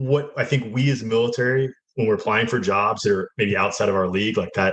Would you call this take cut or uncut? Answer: uncut